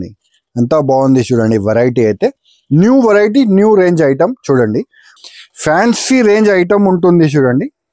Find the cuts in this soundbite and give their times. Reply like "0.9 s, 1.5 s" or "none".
5.1 s